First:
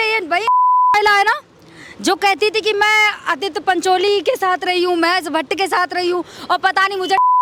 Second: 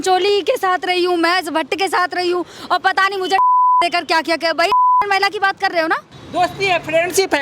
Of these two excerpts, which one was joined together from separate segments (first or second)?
second